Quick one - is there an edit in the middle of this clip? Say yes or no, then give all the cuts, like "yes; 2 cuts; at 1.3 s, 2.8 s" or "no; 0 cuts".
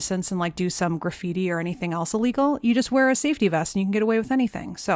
no; 0 cuts